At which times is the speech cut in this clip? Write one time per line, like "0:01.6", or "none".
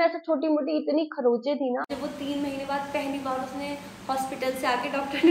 0:01.9